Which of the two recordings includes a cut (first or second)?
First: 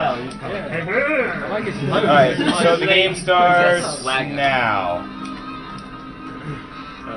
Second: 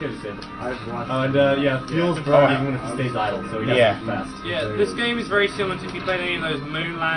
first